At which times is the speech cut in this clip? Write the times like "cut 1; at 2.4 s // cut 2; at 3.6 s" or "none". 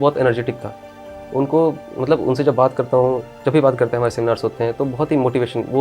none